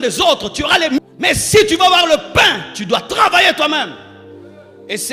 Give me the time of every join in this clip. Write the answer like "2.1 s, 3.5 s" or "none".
1.0 s